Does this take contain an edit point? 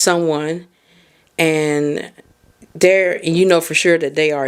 no; 0 cuts

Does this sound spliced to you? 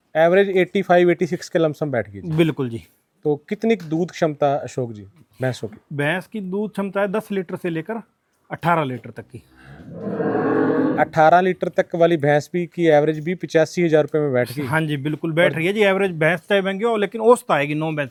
no; 0 cuts

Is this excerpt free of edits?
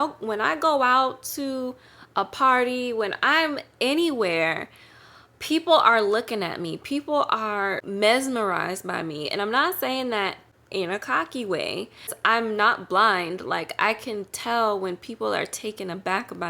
no; 2 cuts; at 7.8 s, 12.2 s

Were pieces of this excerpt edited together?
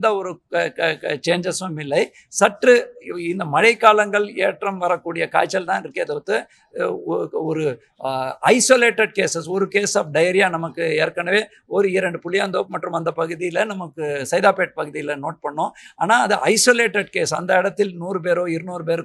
no; 0 cuts

